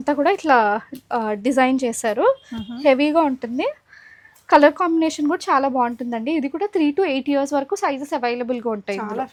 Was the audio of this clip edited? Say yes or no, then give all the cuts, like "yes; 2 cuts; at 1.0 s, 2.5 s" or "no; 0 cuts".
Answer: no; 0 cuts